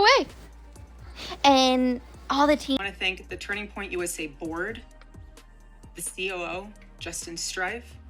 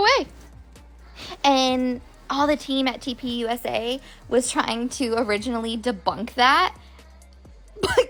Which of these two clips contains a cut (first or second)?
first